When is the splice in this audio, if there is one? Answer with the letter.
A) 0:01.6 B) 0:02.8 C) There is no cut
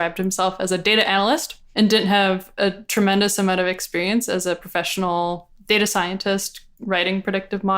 A